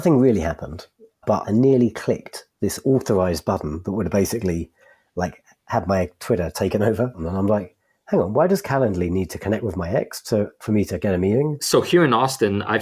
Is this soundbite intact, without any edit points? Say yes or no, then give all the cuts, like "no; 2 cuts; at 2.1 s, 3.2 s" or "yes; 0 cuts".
no; 3 cuts; at 1.3 s, 7.2 s, 11.6 s